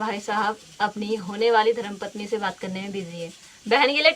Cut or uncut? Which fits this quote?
uncut